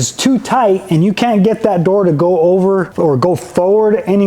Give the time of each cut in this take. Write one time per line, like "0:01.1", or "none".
0:02.9